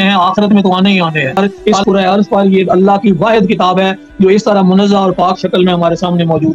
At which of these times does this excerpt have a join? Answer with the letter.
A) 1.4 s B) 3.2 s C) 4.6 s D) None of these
A